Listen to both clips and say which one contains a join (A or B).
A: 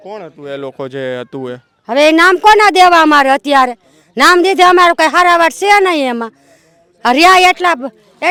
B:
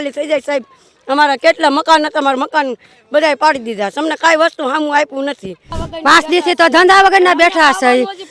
B